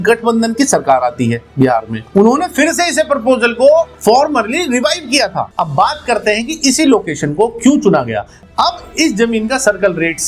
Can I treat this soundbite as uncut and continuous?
no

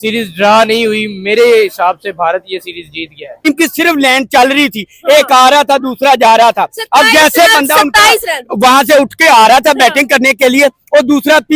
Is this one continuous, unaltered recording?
no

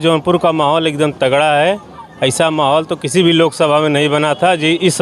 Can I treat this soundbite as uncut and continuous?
yes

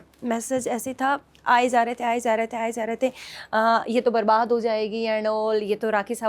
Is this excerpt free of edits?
yes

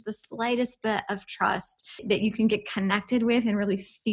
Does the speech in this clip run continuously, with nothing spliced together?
no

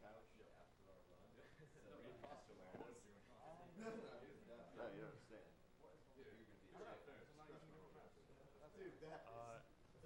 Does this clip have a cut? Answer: no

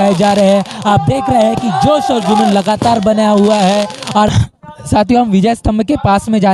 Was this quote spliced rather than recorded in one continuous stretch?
yes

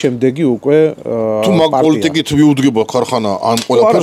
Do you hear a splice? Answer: no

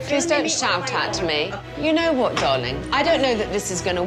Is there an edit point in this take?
no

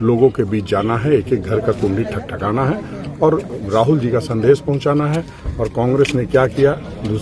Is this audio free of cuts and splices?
yes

